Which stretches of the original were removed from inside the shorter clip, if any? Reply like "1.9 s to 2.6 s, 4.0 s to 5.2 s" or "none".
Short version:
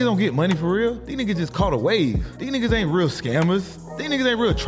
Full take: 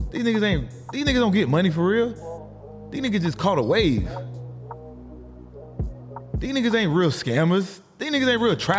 2.2 s to 2.9 s, 4.2 s to 6.3 s

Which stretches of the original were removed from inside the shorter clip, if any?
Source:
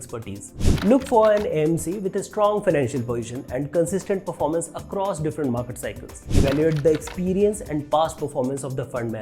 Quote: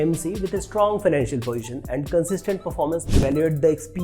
4.7 s to 6.3 s

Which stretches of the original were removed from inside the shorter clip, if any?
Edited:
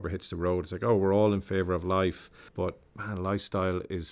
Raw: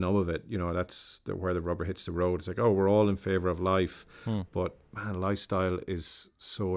4.2 s to 4.5 s

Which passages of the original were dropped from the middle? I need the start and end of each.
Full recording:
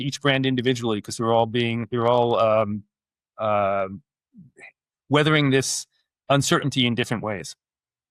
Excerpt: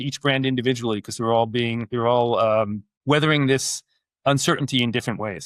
2.9 s to 4.9 s

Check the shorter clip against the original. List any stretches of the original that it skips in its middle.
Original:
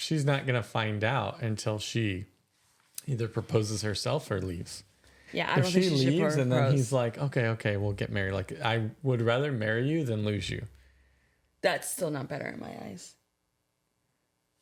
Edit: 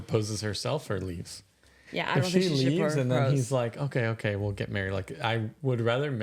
none

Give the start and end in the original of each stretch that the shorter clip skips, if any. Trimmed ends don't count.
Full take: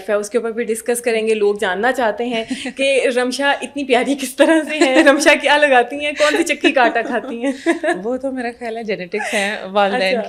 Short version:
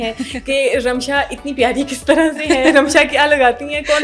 none

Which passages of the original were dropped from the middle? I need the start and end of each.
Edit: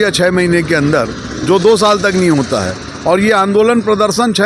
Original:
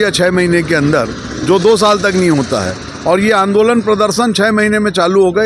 none

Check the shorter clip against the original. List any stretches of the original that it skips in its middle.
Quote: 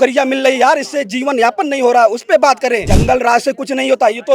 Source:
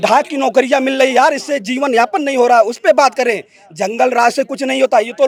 3.5 s to 3.8 s

